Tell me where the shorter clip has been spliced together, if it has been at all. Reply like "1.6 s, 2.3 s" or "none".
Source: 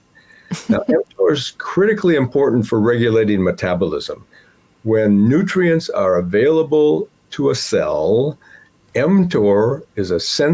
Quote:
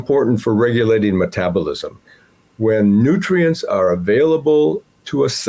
none